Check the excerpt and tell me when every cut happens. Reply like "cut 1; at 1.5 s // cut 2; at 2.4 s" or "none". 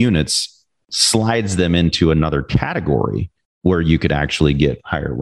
none